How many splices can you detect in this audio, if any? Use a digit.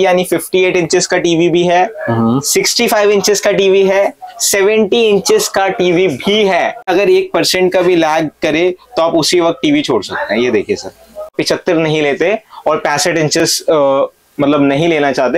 2